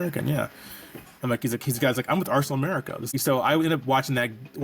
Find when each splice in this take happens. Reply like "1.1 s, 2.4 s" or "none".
3.1 s